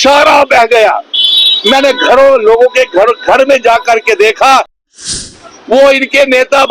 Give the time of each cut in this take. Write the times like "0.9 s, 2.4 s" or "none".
4.9 s